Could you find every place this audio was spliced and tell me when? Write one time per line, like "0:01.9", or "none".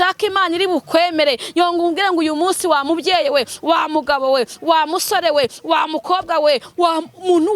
none